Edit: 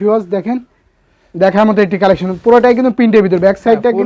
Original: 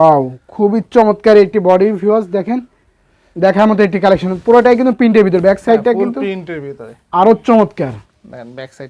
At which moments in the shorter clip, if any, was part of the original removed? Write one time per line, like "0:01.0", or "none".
none